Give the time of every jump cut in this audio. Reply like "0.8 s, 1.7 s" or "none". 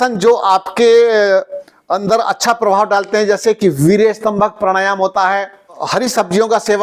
5.8 s